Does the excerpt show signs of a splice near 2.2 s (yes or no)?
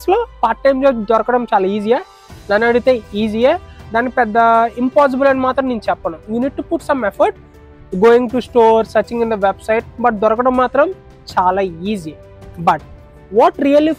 no